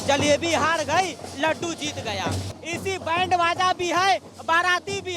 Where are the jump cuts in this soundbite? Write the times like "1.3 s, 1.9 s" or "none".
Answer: 2.5 s